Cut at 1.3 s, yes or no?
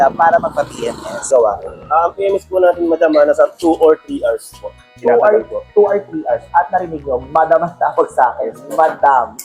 yes